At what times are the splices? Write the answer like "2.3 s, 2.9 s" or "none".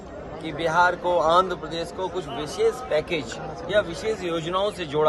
none